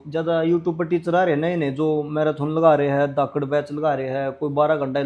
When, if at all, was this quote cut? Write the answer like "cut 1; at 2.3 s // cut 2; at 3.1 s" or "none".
none

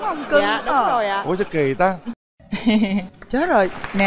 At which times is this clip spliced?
cut 1; at 2.1 s

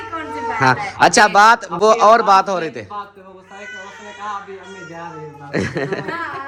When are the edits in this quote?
none

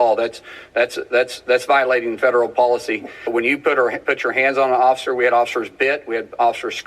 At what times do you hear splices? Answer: cut 1; at 3.3 s

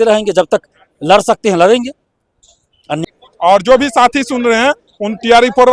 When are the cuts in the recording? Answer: cut 1; at 2.9 s

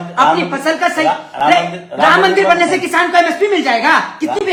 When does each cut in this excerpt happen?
none

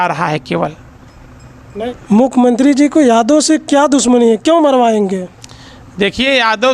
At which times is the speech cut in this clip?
none

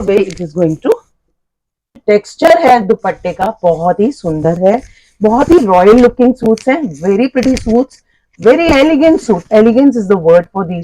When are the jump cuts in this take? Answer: cut 1; at 1.9 s

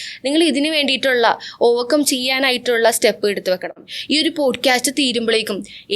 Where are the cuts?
cut 1; at 3.9 s

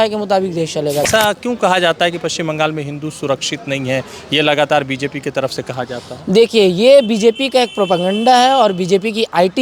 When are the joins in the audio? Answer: cut 1; at 1.0 s

